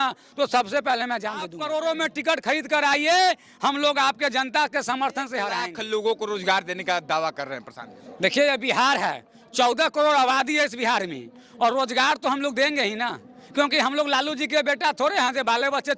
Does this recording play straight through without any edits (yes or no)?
no